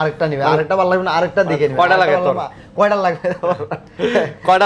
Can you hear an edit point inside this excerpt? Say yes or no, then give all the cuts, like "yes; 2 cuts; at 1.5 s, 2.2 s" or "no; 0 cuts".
no; 0 cuts